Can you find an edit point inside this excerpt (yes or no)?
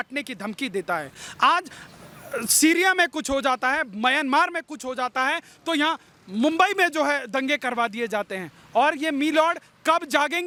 no